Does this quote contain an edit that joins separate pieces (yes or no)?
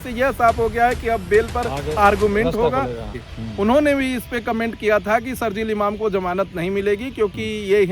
yes